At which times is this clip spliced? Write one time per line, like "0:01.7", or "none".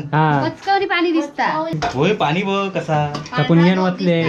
0:01.7